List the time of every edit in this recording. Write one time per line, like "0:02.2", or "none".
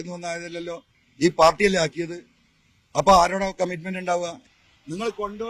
0:04.5